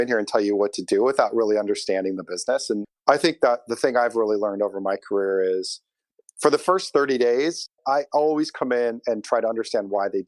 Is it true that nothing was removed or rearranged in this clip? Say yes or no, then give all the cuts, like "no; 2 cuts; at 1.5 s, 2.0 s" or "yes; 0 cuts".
no; 2 cuts; at 2.9 s, 7.7 s